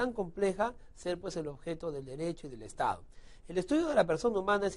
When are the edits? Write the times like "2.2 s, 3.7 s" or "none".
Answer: 1.2 s